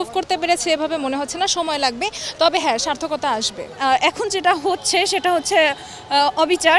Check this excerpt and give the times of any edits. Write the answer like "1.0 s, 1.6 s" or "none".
3.7 s

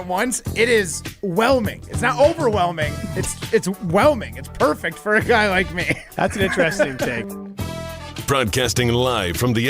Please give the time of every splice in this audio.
7.2 s

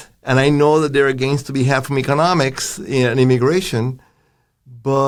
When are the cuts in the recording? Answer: none

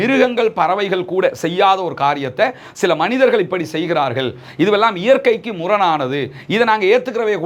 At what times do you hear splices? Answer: none

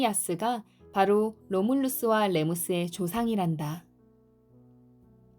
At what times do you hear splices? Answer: 3.9 s

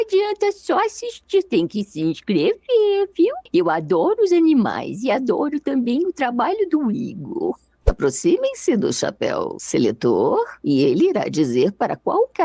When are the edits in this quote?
8.0 s

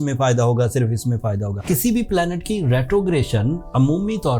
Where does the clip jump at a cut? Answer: 1.6 s

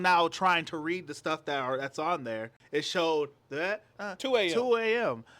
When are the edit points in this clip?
2.6 s, 3.9 s

